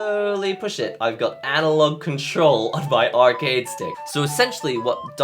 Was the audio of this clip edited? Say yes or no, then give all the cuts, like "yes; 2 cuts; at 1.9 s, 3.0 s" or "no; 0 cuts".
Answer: yes; 1 cut; at 3.9 s